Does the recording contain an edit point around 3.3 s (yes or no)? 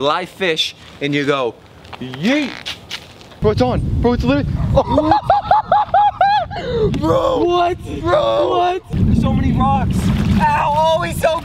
yes